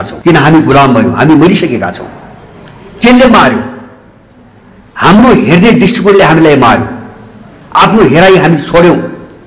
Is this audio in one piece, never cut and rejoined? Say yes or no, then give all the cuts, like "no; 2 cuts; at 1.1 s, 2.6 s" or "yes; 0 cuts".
yes; 0 cuts